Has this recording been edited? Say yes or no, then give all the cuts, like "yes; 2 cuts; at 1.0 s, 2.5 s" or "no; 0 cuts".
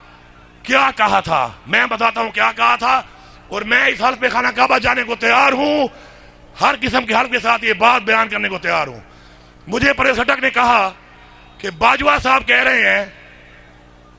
no; 0 cuts